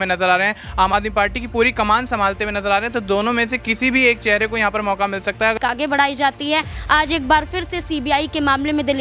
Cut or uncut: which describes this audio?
cut